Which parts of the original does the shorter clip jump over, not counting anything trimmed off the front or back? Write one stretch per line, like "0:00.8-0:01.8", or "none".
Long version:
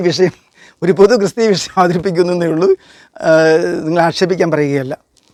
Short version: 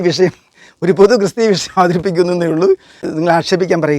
0:03.1-0:03.8